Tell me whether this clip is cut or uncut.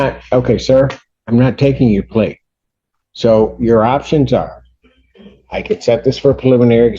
uncut